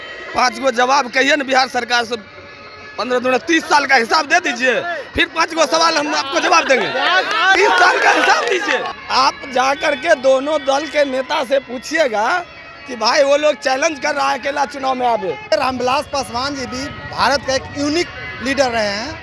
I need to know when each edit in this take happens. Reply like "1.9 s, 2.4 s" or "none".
8.9 s, 15.5 s